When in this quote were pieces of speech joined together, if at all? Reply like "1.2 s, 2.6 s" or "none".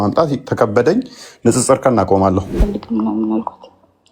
2.5 s